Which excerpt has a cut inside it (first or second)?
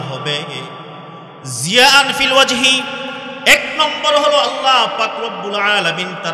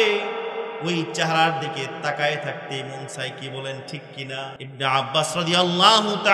second